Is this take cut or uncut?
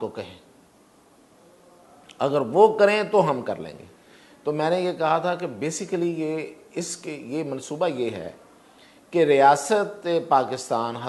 uncut